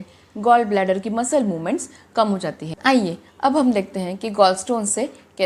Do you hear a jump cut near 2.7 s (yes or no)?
yes